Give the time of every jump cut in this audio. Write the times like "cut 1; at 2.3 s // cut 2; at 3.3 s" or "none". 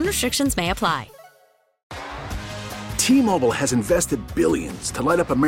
cut 1; at 1.8 s